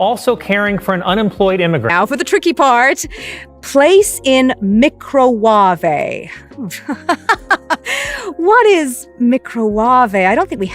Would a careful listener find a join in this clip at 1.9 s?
yes; 1 cut; at 1.9 s

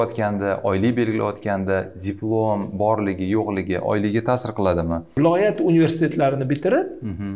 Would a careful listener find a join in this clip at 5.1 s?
yes; 1 cut; at 5.1 s

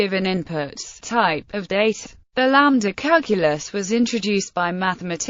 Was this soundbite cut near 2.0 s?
no; 0 cuts

